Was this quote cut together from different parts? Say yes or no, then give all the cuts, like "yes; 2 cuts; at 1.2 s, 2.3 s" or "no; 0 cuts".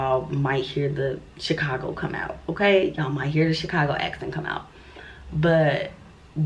no; 0 cuts